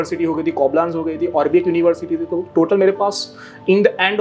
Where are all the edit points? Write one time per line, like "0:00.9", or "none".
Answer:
none

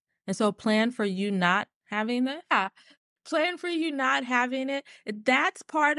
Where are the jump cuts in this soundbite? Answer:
0:02.5

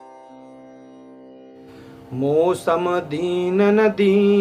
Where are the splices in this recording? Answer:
0:02.2

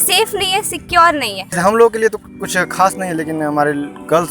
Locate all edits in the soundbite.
0:01.5

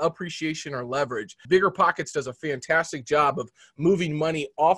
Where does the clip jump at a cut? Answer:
0:01.4

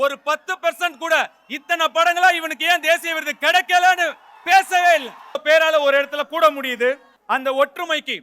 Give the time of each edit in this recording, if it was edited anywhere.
0:05.4

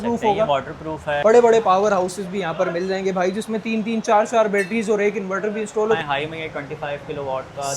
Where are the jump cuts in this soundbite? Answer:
0:01.1
0:06.0

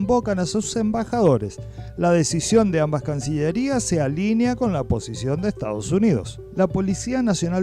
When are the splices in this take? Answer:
none

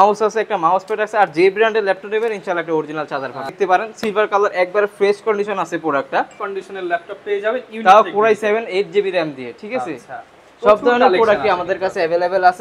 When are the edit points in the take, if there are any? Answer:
0:03.5
0:06.4

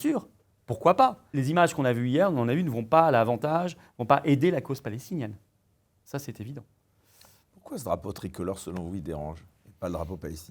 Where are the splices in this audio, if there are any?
0:01.2

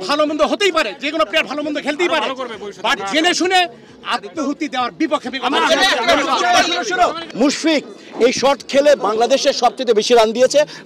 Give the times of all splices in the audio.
0:07.2

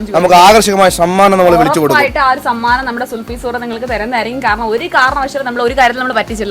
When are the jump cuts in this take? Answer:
none

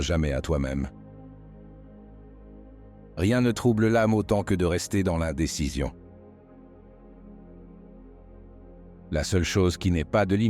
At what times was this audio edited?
0:00.9
0:03.1
0:06.6
0:08.5

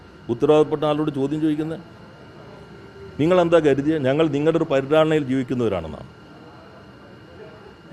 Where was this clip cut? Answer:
none

